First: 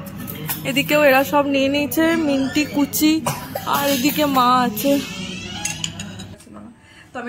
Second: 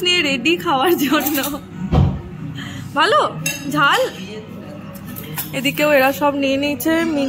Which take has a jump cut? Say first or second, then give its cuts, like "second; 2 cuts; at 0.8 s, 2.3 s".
first; 1 cut; at 6.4 s